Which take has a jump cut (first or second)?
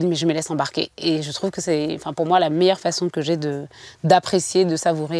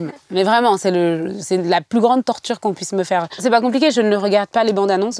second